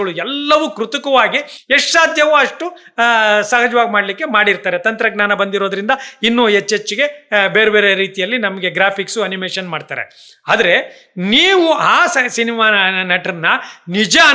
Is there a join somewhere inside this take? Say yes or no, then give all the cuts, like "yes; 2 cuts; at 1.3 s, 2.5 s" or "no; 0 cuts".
no; 0 cuts